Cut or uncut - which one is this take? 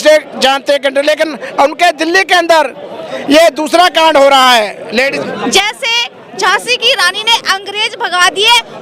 cut